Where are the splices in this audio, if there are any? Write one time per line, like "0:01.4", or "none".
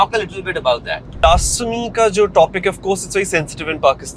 0:01.2